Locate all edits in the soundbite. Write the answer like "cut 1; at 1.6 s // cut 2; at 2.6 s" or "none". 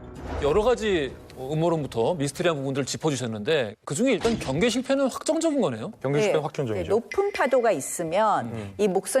cut 1; at 6.8 s